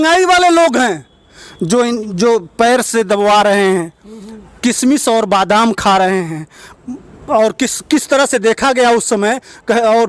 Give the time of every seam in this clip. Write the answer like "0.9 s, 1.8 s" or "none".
none